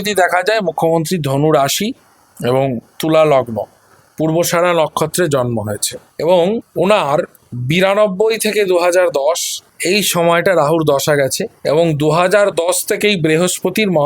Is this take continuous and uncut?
yes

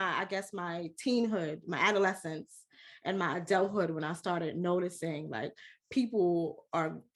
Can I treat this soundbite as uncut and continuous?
yes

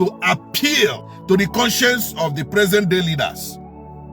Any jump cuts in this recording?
yes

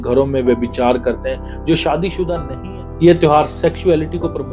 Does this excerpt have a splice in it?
yes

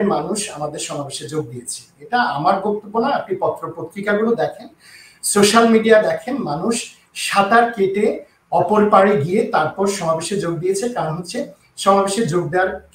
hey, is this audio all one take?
yes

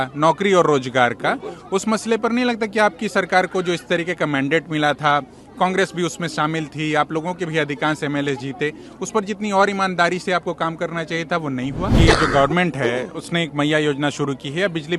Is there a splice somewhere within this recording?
yes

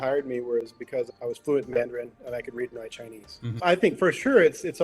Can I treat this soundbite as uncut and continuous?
no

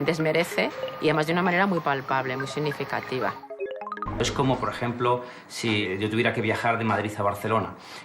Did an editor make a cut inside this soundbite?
yes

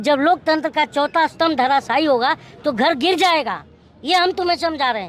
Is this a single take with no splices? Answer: yes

